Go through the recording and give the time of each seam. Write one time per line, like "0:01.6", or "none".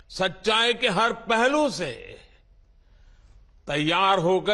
none